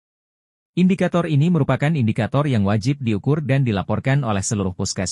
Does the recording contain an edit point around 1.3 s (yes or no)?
no